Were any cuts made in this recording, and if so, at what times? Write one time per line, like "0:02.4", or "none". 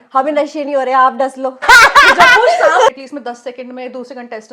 0:01.6
0:02.9